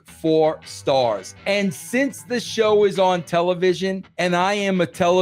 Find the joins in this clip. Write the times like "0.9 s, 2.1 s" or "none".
1.3 s, 4.1 s

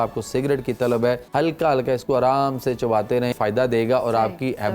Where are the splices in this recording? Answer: 1.2 s, 3.3 s

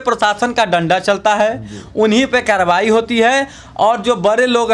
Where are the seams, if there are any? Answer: none

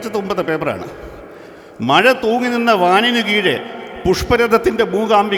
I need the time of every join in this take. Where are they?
none

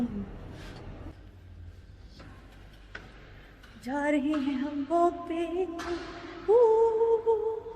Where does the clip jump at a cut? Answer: 1.2 s

